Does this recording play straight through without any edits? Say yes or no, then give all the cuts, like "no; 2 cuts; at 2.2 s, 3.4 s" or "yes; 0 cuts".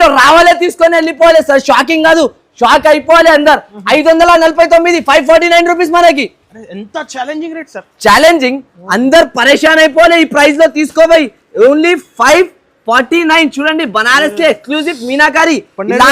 no; 1 cut; at 3.7 s